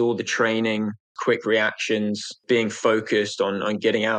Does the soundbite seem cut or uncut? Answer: cut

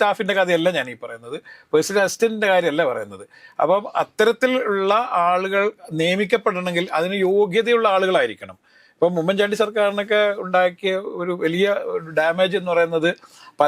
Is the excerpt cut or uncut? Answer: uncut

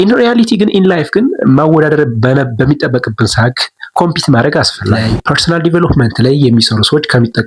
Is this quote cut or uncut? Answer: cut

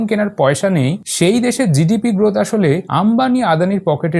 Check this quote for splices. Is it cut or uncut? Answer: cut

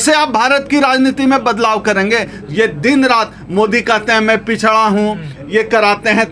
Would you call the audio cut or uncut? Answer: uncut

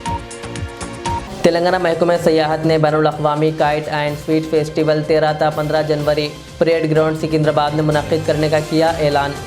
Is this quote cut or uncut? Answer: cut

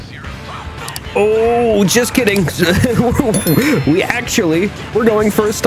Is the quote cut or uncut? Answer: uncut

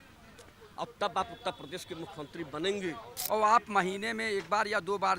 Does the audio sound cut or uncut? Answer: cut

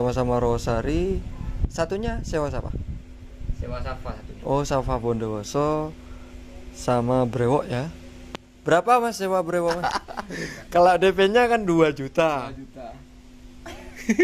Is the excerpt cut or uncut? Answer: cut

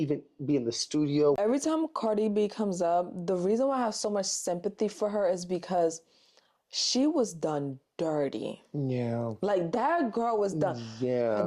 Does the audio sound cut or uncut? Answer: cut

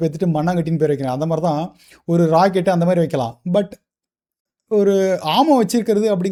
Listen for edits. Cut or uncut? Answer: uncut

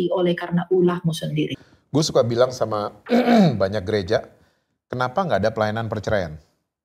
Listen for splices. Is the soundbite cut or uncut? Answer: cut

